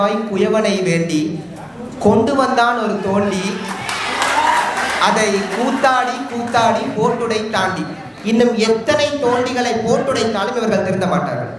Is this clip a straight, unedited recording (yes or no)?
yes